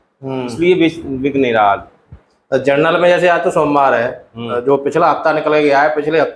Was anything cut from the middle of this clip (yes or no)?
no